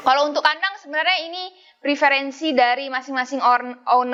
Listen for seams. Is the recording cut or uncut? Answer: uncut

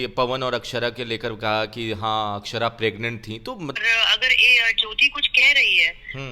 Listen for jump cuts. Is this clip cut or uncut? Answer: cut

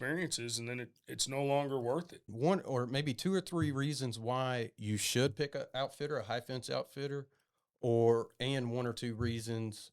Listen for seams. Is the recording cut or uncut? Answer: cut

